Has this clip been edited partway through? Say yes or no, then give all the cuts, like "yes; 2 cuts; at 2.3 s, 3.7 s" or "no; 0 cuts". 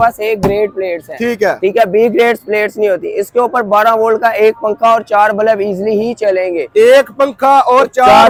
no; 0 cuts